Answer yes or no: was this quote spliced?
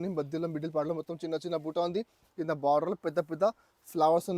no